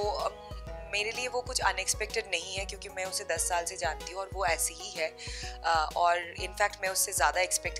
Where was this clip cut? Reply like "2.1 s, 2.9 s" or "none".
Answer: none